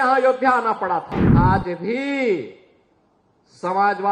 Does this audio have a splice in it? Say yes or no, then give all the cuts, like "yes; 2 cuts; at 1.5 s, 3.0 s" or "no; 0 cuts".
yes; 1 cut; at 1.2 s